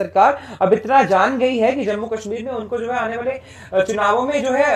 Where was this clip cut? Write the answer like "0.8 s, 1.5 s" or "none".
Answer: none

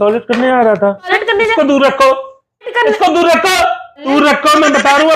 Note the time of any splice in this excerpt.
1.1 s, 2.7 s, 4.1 s

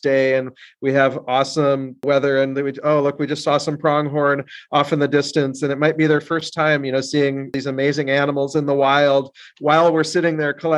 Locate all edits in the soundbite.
2.0 s, 7.6 s

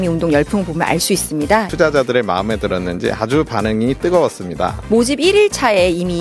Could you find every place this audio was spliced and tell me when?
1.7 s

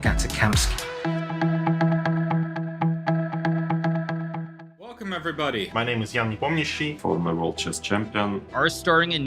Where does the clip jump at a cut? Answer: 4.9 s

